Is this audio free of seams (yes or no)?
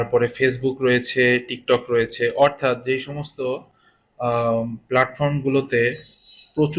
yes